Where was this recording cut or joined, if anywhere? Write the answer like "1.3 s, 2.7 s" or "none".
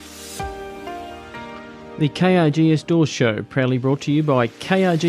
1.9 s